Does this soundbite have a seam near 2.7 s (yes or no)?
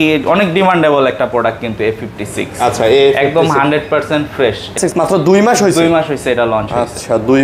no